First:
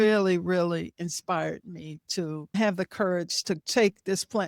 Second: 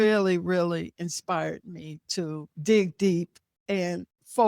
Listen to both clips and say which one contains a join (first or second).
first